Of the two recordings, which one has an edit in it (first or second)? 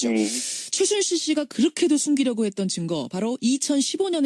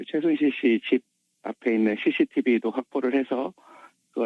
second